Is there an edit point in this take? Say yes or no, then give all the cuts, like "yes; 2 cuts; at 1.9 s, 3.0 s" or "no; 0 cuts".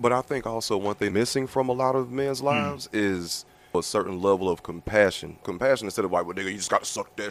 yes; 3 cuts; at 1.1 s, 3.7 s, 5.5 s